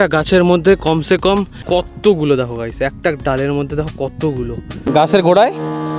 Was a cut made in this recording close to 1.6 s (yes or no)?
yes